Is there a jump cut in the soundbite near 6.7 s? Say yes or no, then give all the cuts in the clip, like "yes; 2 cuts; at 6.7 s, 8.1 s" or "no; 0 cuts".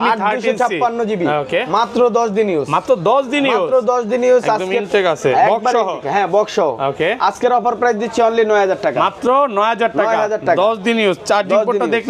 no; 0 cuts